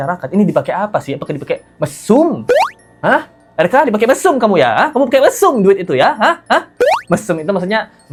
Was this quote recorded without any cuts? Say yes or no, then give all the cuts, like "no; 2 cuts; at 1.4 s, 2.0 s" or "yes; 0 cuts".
yes; 0 cuts